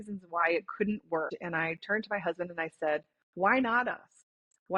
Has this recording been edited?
yes; 1 cut; at 1.3 s

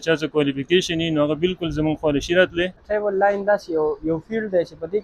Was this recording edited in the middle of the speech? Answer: yes; 1 cut; at 2.8 s

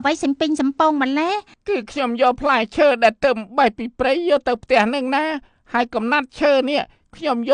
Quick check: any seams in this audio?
yes; 1 cut; at 1.5 s

